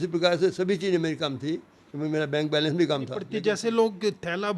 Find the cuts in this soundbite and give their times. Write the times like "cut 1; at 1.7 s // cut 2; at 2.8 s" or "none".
cut 1; at 3.4 s